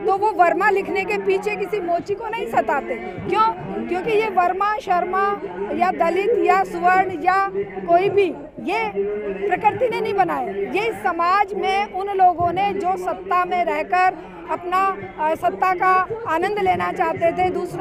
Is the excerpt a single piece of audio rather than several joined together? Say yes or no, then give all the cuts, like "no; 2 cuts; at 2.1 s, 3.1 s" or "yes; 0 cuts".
yes; 0 cuts